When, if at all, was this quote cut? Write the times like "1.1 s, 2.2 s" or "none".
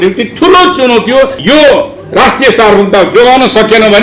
1.4 s